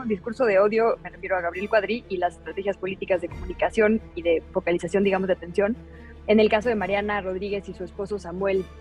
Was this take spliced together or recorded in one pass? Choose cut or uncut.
uncut